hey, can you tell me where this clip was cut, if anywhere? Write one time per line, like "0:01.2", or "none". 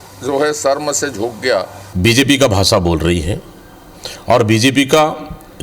0:01.8